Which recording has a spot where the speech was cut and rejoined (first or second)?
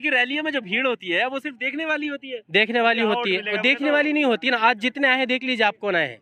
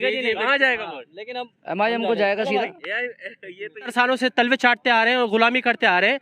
second